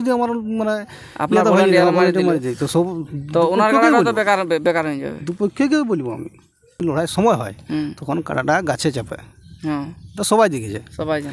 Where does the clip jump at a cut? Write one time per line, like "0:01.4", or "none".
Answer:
0:06.8